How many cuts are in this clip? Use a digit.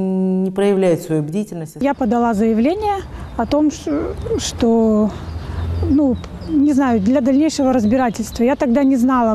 1